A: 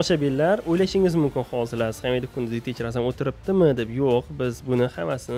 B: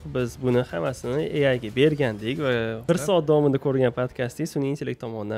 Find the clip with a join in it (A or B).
B